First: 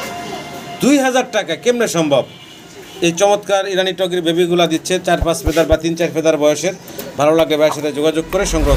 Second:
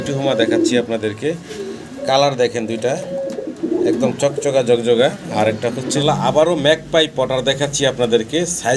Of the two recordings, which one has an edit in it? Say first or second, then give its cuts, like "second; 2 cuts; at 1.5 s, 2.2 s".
second; 1 cut; at 6.0 s